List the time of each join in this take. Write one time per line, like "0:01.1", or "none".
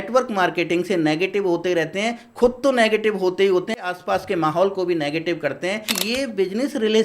0:03.8
0:05.9